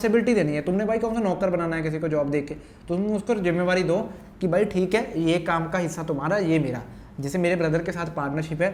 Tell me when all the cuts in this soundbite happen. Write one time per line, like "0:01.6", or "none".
none